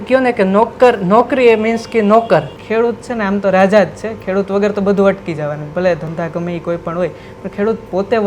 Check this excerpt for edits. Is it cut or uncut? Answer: cut